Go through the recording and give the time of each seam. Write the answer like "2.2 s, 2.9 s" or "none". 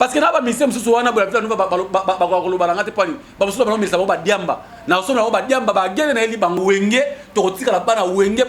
6.6 s